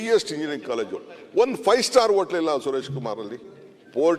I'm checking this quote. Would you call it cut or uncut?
uncut